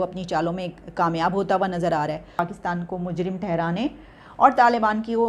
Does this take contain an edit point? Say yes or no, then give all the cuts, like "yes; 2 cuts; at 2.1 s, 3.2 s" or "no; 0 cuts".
yes; 1 cut; at 2.2 s